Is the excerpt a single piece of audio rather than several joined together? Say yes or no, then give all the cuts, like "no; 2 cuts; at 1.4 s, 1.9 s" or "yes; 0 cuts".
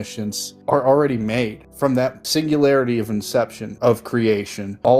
no; 1 cut; at 3.6 s